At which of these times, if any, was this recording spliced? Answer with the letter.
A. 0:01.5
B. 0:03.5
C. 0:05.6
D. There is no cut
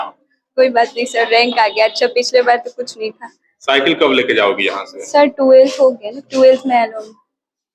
D